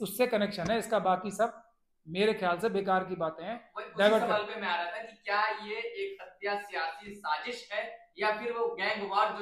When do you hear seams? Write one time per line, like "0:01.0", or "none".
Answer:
none

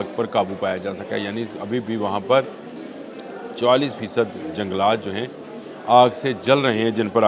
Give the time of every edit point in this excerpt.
none

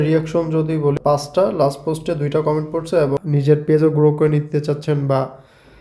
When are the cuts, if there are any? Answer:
0:01.1
0:03.2

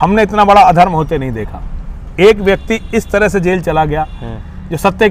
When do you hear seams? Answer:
none

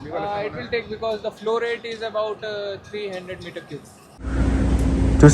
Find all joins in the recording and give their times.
0:04.2

